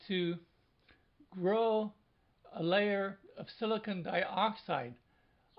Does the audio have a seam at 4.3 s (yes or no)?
no